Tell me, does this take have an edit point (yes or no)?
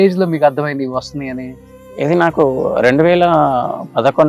no